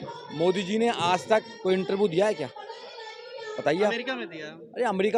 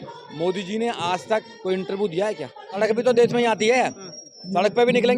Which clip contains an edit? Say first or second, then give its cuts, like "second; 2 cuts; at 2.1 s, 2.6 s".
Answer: second; 1 cut; at 2.8 s